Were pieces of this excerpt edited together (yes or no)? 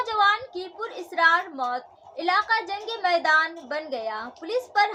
no